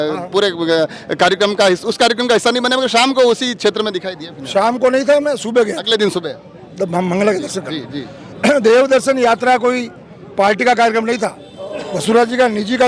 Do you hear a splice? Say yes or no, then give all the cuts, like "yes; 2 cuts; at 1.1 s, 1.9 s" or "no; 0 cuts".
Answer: no; 0 cuts